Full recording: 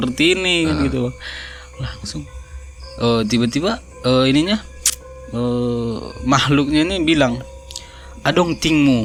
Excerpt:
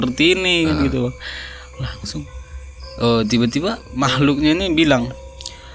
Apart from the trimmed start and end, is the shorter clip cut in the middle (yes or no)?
yes